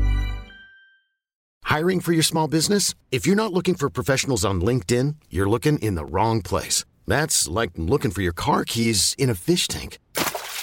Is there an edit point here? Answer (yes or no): yes